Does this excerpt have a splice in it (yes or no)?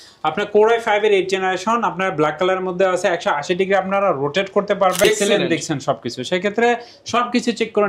yes